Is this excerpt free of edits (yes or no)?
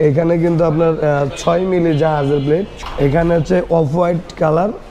no